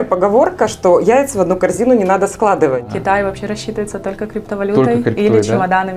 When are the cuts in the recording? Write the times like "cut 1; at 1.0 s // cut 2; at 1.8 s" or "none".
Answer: cut 1; at 2.8 s